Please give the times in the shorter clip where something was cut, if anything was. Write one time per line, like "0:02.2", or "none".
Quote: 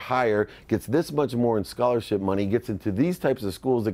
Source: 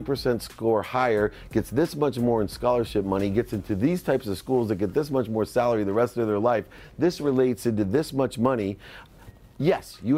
none